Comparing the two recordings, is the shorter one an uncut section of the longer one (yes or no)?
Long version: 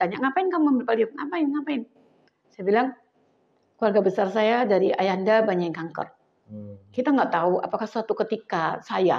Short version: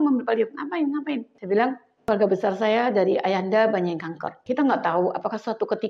no